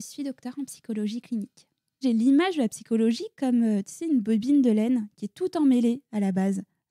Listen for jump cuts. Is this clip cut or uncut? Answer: cut